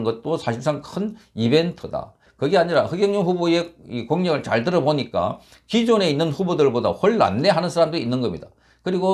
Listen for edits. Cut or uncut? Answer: cut